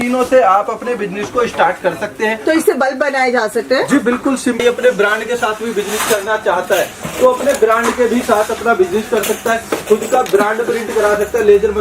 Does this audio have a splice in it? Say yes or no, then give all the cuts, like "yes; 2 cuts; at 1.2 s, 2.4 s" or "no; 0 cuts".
yes; 1 cut; at 4.6 s